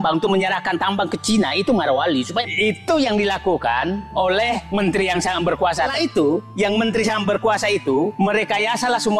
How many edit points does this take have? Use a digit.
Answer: 2